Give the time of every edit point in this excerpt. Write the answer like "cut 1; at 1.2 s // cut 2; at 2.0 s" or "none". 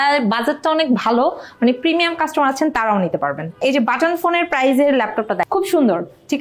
cut 1; at 3.6 s // cut 2; at 5.4 s